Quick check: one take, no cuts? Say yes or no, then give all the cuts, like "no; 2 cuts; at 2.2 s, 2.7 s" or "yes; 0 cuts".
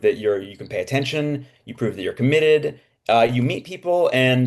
yes; 0 cuts